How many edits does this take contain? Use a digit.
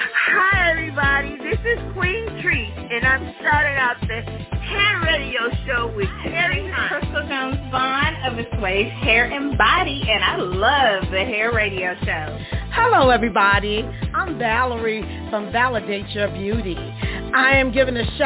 0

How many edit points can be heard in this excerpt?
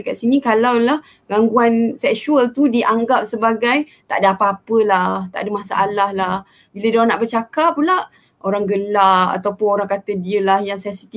0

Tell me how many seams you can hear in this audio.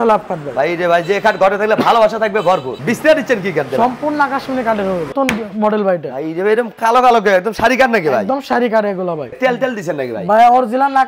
3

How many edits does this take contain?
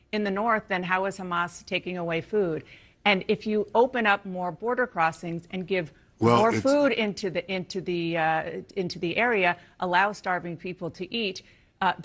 0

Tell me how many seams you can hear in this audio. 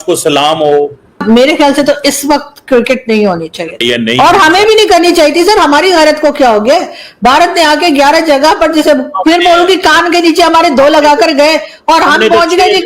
2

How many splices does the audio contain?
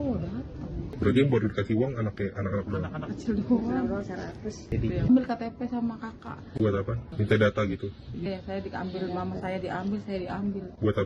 3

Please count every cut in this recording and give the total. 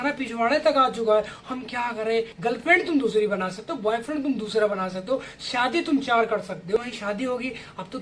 2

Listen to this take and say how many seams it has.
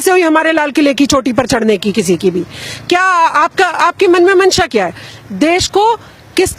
0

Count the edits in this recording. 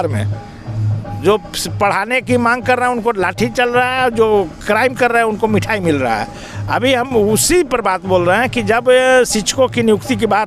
0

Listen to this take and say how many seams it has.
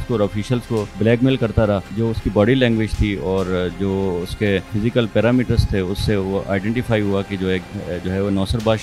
3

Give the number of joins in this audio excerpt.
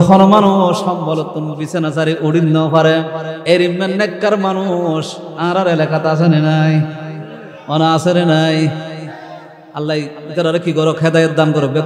0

